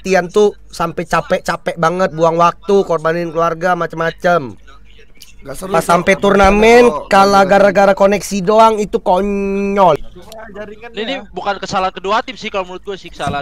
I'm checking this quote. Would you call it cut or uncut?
cut